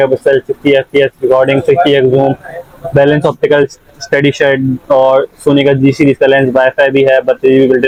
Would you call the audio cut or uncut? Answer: uncut